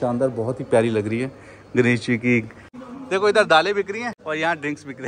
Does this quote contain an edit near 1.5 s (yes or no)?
no